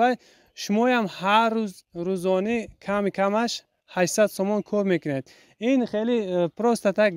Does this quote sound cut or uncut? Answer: uncut